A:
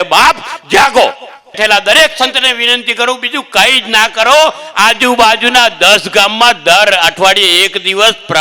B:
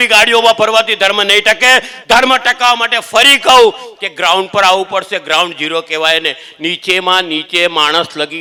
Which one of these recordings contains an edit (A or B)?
A